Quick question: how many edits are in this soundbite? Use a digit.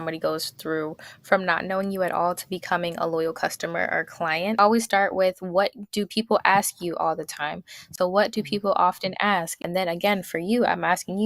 3